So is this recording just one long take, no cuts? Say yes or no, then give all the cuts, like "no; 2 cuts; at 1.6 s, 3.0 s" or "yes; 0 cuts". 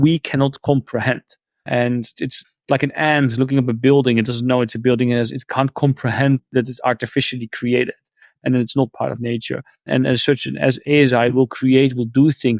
no; 1 cut; at 10.8 s